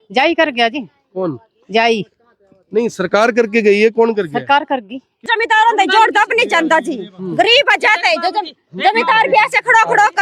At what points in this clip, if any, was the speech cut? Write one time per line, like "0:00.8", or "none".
0:05.2